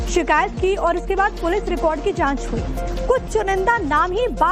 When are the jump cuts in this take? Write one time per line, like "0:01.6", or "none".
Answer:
none